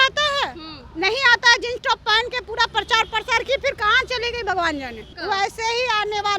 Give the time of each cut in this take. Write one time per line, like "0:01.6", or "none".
0:05.1